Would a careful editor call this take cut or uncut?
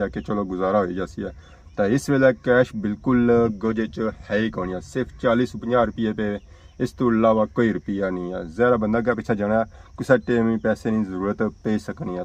uncut